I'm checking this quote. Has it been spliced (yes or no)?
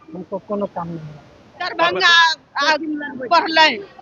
yes